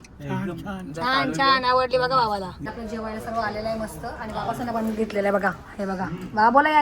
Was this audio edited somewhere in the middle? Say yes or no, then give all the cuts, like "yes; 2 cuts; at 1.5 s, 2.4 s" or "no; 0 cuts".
yes; 1 cut; at 2.6 s